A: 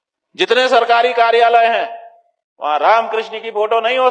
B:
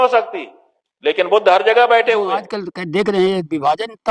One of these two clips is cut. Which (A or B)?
B